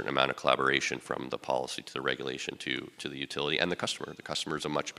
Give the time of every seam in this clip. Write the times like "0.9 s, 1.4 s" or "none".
none

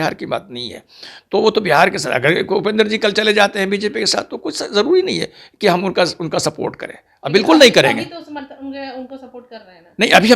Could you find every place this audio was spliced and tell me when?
none

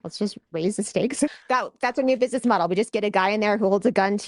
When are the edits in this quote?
1.3 s

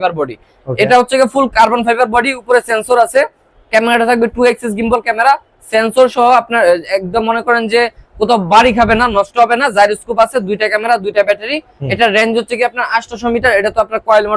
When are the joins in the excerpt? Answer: none

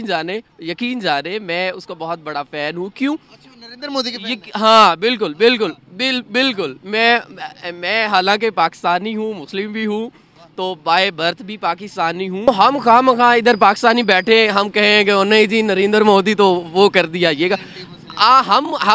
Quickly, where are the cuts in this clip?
12.5 s

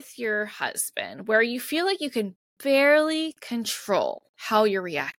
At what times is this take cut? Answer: 4.3 s

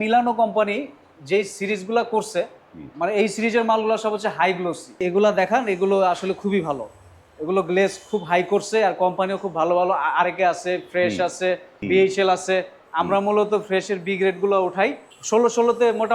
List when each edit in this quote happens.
5.0 s, 11.7 s, 15.1 s

